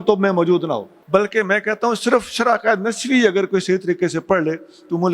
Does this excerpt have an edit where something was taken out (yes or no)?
yes